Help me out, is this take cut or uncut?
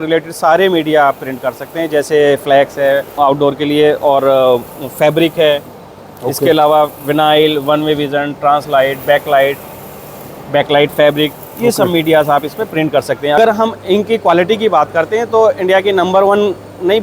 cut